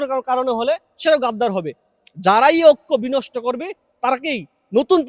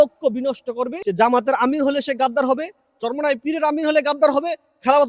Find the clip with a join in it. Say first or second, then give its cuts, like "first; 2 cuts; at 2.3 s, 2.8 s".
second; 1 cut; at 0.9 s